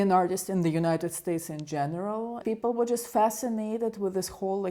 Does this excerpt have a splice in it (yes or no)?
yes